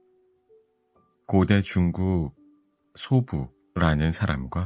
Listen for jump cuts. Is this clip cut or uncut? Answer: cut